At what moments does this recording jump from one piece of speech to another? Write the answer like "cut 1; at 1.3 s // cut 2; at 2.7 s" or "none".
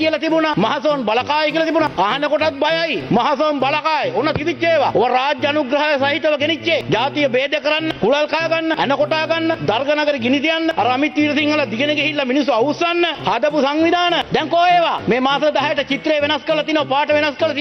none